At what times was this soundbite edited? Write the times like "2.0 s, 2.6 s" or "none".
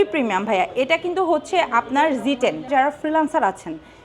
2.7 s